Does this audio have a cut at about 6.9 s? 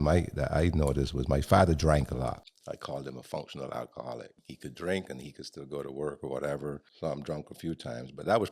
yes; 3 cuts; at 2.5 s, 4.4 s, 6.9 s

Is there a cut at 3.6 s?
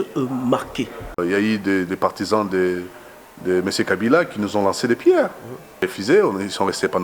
no; 2 cuts; at 1.2 s, 5.9 s

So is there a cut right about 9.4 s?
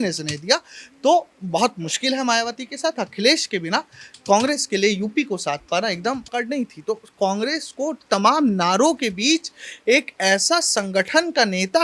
no; 1 cut; at 6.3 s

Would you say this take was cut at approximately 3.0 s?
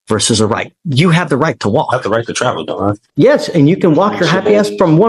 yes; 1 cut; at 3.0 s

